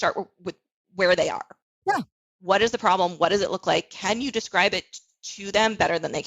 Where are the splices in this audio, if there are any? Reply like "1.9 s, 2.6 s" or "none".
1.6 s